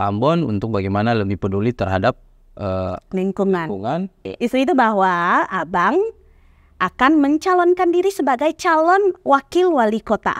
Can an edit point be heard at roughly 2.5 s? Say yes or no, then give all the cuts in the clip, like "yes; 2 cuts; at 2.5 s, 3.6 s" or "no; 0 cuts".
no; 1 cut; at 4.2 s